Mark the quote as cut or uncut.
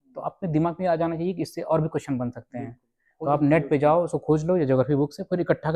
uncut